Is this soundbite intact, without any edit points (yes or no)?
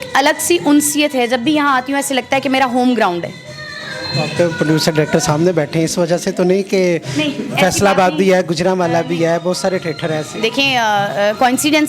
yes